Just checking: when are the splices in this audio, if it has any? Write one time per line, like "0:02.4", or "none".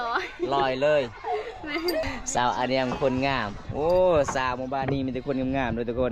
0:02.0